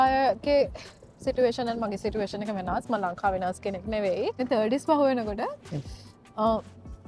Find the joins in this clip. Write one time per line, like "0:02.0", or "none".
0:04.4